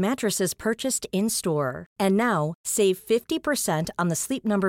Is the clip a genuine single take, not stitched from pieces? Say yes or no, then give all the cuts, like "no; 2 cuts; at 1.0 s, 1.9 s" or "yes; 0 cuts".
yes; 0 cuts